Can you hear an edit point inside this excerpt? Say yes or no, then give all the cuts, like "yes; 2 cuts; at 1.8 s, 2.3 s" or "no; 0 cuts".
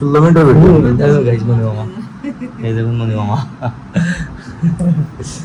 no; 0 cuts